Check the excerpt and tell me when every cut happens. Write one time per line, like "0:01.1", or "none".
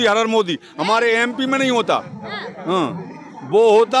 none